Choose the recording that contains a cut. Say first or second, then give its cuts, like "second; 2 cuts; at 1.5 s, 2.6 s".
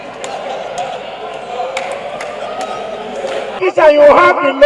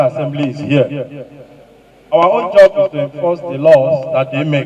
first; 1 cut; at 3.6 s